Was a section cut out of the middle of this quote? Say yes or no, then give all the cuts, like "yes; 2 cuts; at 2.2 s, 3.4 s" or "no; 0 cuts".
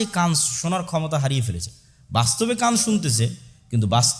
no; 0 cuts